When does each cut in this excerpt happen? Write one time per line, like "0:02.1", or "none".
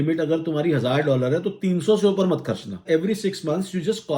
0:02.8